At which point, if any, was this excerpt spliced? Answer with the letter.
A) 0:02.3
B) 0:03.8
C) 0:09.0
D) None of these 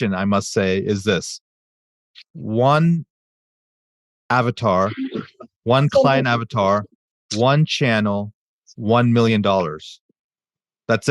D